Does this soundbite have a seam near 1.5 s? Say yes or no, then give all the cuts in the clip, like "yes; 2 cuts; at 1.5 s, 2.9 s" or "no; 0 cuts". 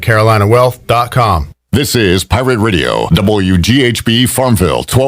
yes; 1 cut; at 1.5 s